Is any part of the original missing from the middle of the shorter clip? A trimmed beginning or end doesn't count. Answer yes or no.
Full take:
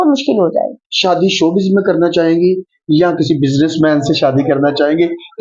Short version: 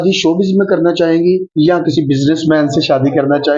yes